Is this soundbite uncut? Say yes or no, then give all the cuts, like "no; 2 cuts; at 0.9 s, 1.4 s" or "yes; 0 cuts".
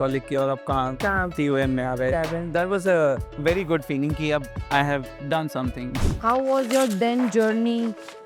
no; 3 cuts; at 3.3 s, 4.6 s, 5.9 s